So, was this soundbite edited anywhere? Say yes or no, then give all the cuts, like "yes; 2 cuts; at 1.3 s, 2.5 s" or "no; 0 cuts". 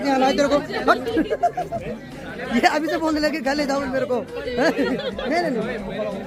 no; 0 cuts